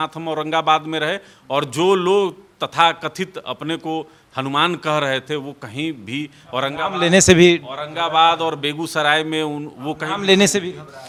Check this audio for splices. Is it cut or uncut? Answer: uncut